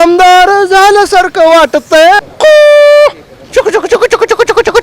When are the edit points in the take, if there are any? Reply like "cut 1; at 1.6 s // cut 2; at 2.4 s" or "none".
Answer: cut 1; at 2.3 s